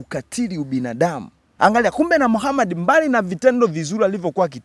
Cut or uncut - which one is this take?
cut